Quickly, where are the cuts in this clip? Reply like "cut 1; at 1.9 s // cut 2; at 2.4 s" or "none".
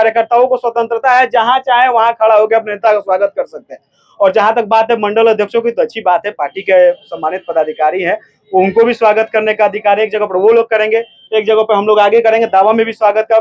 none